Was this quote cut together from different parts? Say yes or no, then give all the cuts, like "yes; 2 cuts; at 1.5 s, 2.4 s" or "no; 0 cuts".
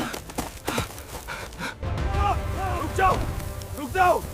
yes; 1 cut; at 1.8 s